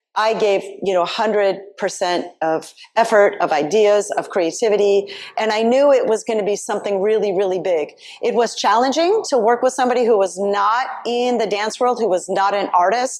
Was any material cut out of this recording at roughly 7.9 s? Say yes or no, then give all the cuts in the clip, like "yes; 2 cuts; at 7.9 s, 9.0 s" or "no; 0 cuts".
no; 0 cuts